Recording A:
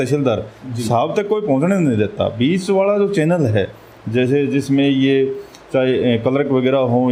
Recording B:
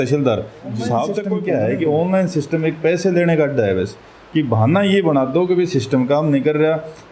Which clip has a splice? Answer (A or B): B